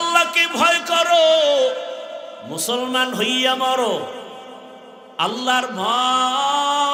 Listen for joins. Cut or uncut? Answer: uncut